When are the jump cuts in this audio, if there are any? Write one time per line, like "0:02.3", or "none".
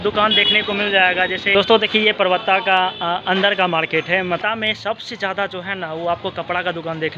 0:01.5
0:04.4